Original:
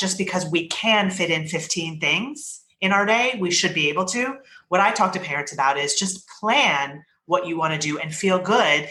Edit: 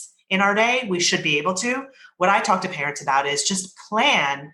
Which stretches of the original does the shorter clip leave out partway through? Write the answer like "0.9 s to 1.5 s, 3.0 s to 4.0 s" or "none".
none